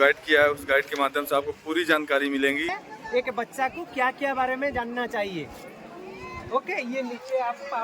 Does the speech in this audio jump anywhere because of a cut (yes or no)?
yes